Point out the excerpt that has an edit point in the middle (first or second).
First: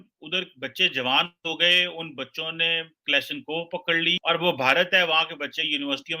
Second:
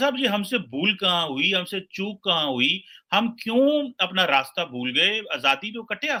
first